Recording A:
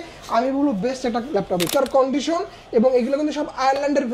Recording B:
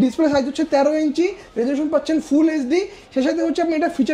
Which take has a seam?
A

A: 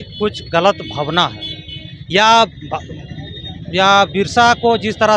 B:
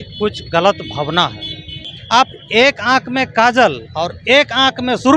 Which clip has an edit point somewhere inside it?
B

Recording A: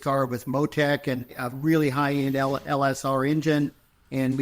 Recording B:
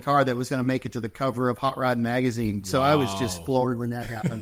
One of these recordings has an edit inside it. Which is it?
A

